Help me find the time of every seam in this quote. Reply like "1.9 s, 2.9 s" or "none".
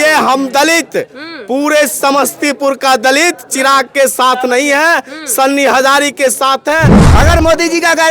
7.1 s